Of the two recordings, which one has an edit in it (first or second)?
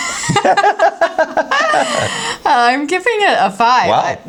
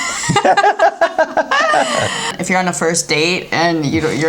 second